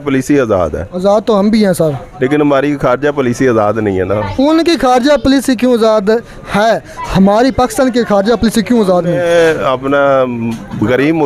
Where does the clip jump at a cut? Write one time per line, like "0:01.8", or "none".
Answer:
none